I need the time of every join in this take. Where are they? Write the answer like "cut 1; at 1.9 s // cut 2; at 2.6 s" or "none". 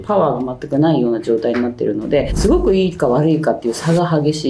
none